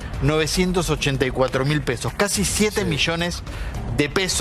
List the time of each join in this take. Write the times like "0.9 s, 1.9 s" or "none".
none